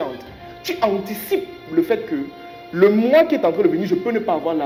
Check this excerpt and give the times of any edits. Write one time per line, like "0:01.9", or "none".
none